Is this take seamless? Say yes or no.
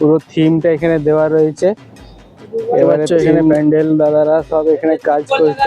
no